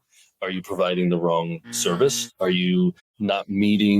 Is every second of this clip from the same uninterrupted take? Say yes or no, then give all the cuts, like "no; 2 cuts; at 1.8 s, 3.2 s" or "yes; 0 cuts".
no; 1 cut; at 3.1 s